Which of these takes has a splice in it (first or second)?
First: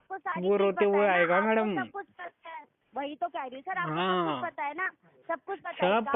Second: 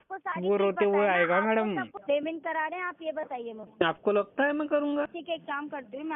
second